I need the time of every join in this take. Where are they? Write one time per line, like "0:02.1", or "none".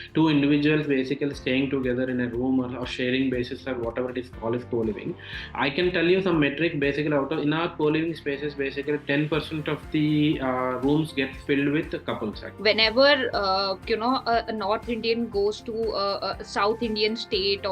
0:12.5